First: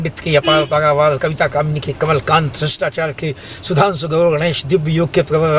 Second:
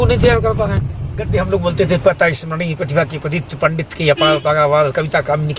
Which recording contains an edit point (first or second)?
second